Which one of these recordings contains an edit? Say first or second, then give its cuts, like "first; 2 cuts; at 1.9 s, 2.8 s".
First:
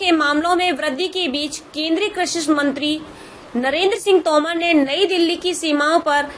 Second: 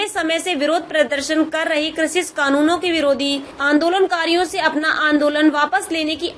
second; 1 cut; at 3.5 s